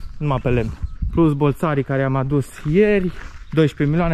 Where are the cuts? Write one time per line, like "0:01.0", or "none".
0:00.9